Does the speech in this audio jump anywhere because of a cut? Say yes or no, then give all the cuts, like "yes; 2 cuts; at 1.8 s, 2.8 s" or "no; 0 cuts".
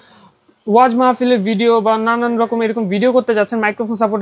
no; 0 cuts